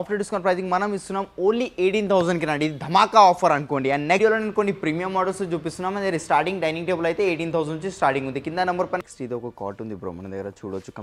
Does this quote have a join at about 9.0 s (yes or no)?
yes